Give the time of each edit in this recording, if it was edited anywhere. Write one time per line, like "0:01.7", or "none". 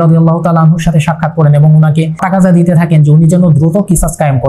0:02.2